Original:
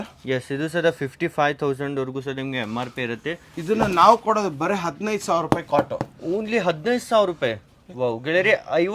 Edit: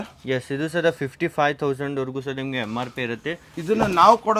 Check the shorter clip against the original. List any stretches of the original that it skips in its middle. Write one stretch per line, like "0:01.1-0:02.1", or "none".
none

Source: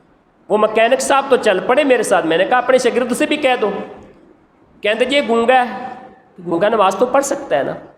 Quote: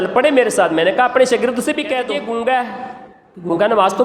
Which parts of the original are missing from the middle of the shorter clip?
0:03.6-0:05.1

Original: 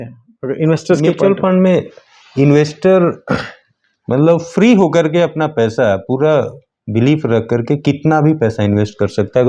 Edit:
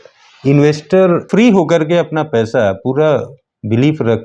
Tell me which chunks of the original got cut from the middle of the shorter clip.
0:03.2-0:04.5

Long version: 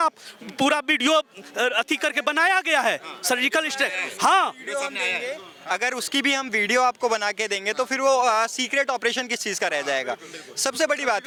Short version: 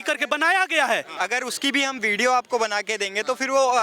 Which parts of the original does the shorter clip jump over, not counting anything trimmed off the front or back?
0:03.0-0:05.6

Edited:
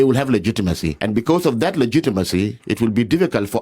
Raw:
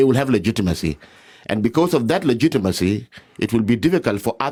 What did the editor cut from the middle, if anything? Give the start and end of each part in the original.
0:00.9-0:01.4
0:03.1-0:03.3

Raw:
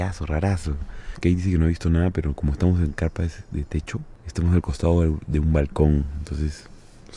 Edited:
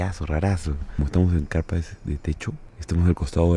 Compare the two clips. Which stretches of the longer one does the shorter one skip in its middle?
0:00.9-0:02.4

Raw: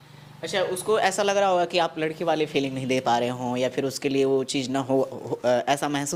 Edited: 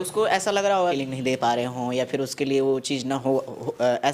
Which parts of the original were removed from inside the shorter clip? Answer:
0:01.7-0:02.6

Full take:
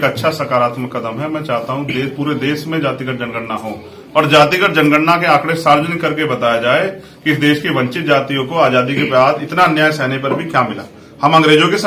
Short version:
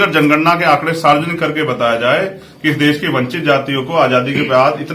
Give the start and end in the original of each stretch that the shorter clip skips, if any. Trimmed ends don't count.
none

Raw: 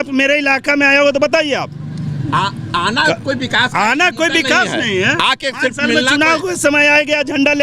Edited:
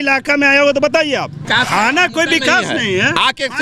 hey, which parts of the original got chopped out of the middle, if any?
0:01.8-0:03.5

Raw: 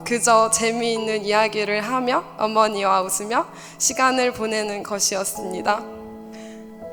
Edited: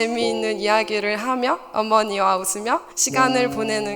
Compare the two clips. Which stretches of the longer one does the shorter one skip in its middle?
0:03.6-0:03.8

